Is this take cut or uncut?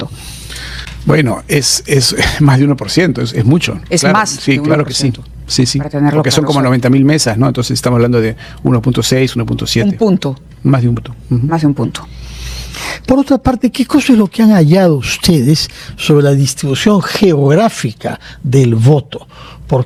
uncut